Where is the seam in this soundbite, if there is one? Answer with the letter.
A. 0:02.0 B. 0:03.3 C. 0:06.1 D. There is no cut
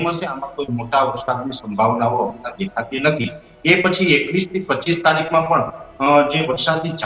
D